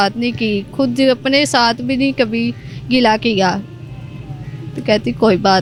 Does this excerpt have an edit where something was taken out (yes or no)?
no